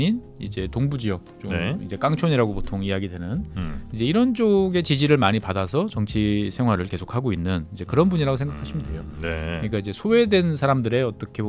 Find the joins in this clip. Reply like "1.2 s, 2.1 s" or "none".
none

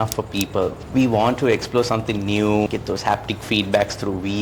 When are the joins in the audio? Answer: 0.8 s, 2.7 s

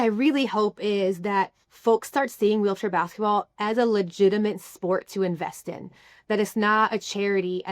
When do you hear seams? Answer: 1.6 s

